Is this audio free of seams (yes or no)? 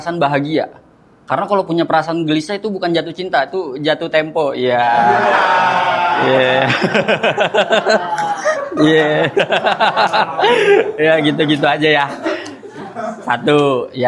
yes